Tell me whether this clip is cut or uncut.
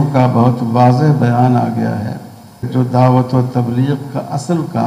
cut